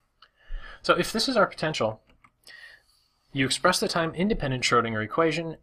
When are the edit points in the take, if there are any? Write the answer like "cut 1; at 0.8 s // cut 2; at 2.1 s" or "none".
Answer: cut 1; at 2.7 s